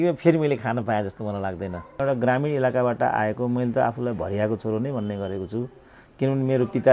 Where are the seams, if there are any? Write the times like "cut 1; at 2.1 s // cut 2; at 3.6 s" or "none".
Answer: cut 1; at 2.0 s